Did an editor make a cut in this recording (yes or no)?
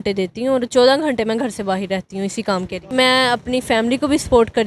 yes